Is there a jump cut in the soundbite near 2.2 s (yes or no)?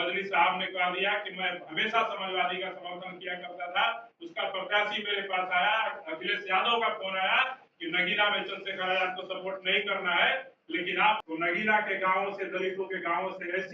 no